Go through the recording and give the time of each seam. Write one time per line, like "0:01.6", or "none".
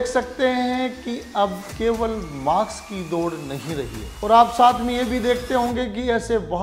0:01.7
0:04.0